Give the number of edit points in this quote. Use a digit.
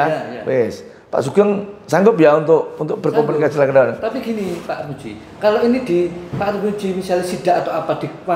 0